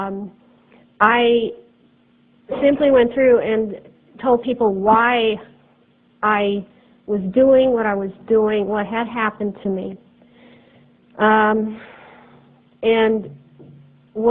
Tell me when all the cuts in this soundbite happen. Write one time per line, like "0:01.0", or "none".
0:07.4